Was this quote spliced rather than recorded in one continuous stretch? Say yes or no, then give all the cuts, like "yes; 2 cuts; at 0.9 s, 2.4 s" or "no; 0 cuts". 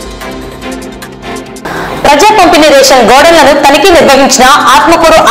yes; 1 cut; at 1.3 s